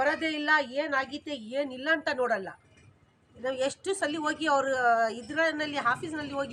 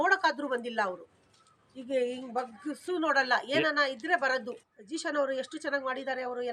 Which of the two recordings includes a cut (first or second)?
second